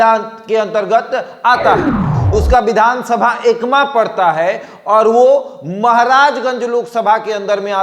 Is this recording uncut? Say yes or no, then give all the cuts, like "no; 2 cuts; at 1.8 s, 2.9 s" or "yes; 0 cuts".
no; 1 cut; at 2.2 s